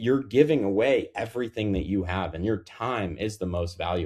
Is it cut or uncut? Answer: uncut